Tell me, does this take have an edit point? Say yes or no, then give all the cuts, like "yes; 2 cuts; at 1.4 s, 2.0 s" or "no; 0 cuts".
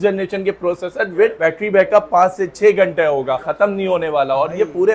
yes; 2 cuts; at 1.4 s, 3.5 s